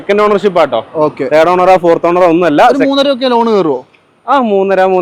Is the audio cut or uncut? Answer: uncut